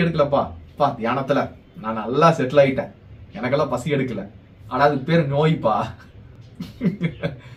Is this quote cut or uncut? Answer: uncut